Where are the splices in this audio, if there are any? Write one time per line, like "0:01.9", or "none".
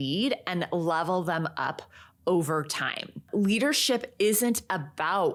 none